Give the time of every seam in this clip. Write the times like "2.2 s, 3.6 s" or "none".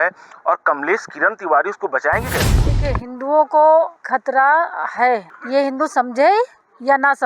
2.6 s, 4.0 s, 5.3 s